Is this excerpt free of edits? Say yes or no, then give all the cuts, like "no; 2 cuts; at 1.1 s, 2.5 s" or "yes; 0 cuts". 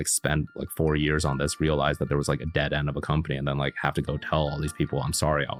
yes; 0 cuts